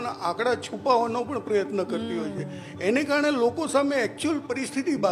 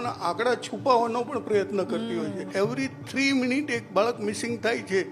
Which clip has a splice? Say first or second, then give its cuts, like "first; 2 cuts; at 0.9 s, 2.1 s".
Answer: second; 1 cut; at 2.4 s